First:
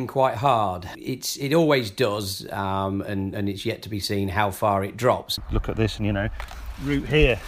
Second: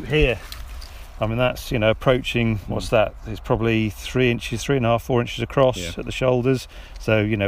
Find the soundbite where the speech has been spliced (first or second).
first